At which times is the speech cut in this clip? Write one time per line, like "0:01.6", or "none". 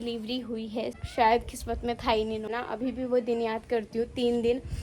0:01.0
0:02.5